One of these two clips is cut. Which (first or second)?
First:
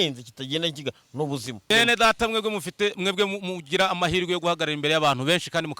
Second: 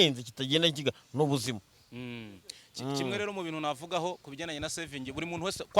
first